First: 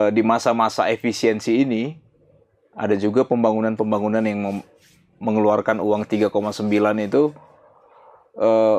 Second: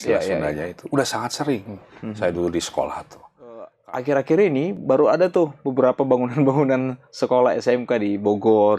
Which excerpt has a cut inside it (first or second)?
second